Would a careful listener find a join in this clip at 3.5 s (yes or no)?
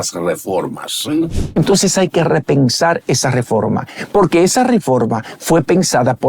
no